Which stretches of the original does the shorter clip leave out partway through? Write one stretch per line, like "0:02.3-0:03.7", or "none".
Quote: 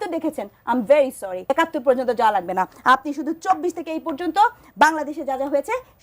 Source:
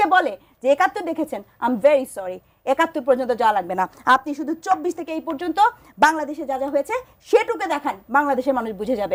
0:02.3-0:02.6